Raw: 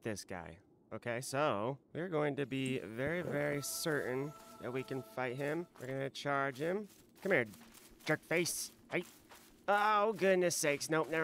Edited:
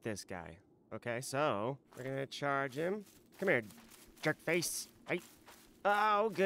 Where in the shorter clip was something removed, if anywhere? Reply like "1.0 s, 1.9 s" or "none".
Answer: 1.9 s

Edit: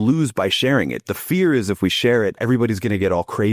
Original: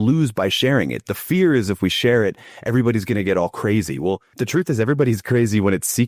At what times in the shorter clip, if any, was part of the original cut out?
2.4 s

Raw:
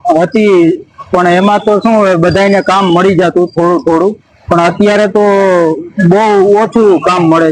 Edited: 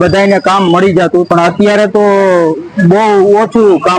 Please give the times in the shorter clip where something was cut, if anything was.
1.3 s

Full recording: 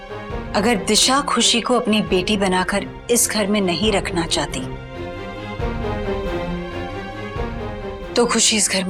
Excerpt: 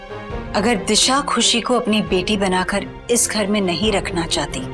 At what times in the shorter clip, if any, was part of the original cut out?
none

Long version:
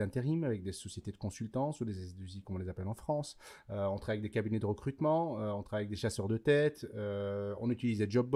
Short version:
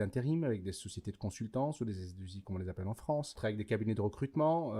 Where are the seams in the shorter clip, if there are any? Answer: 3.4 s

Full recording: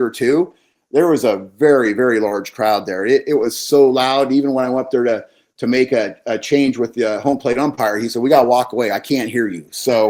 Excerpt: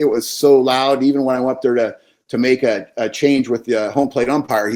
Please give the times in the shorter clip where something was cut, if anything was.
none

